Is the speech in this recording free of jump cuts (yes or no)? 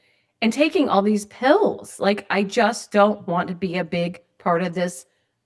yes